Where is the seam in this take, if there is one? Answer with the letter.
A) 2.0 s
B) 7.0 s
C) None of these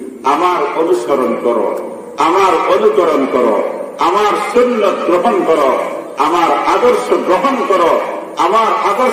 C